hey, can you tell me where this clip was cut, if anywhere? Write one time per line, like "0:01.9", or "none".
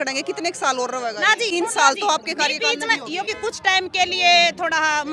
0:01.5
0:03.3